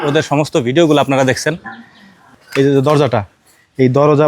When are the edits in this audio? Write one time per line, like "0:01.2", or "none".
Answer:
0:02.3